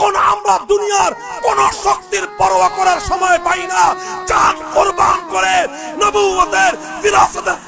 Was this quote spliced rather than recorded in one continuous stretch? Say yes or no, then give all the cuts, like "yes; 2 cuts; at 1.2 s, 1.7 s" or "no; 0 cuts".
no; 0 cuts